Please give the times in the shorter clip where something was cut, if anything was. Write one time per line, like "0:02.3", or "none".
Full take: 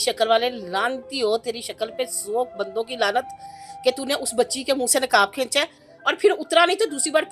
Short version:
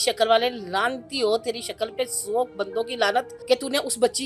0:03.3